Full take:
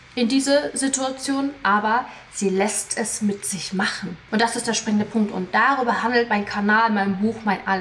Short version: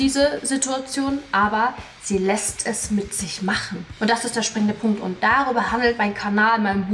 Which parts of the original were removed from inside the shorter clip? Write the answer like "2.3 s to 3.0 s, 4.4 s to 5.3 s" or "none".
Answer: none